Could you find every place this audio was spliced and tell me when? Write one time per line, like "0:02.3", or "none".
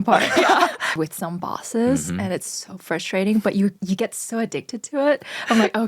0:01.0